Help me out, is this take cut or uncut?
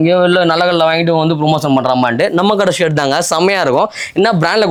uncut